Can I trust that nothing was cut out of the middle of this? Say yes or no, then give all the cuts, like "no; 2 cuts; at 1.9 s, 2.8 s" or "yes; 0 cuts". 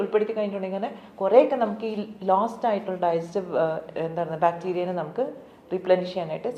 yes; 0 cuts